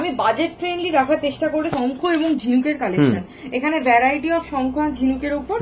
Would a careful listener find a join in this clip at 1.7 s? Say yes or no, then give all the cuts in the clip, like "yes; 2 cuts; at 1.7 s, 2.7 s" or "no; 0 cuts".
yes; 1 cut; at 1.7 s